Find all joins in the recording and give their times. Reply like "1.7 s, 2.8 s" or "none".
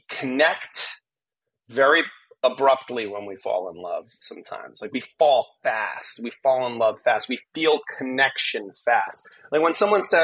none